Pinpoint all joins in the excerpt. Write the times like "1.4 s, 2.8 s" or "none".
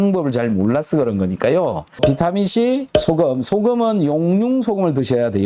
1.9 s